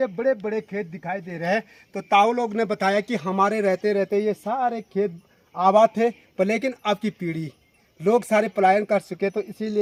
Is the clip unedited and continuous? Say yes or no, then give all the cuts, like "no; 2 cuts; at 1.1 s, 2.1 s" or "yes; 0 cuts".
yes; 0 cuts